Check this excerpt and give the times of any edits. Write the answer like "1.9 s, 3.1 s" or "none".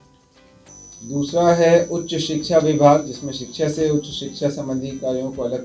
none